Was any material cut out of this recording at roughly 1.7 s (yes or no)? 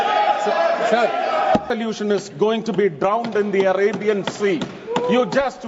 yes